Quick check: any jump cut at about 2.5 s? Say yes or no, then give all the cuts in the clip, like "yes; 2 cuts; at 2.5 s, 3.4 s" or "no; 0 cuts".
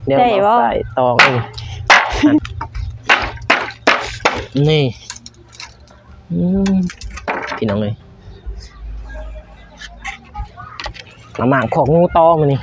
yes; 1 cut; at 2.5 s